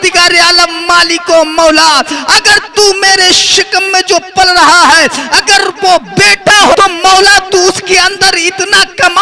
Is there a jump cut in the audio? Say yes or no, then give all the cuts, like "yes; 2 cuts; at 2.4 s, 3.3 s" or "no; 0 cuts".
no; 0 cuts